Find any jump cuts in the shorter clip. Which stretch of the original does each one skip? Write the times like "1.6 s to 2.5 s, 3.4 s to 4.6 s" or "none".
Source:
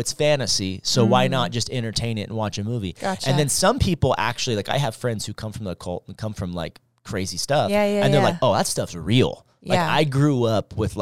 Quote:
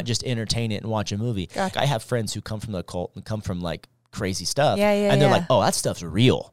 3.2 s to 4.7 s